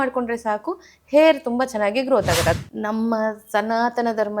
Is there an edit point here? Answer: yes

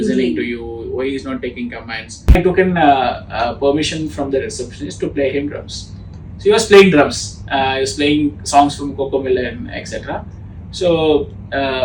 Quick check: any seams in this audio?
yes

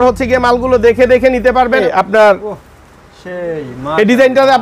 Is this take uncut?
no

